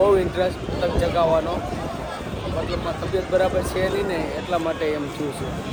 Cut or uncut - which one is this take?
uncut